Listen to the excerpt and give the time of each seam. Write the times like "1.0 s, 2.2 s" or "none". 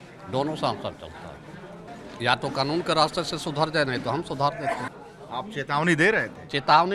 1.9 s, 4.9 s